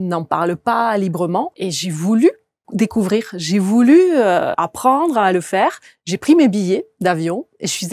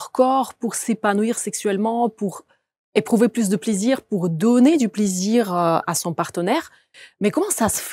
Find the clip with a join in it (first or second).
first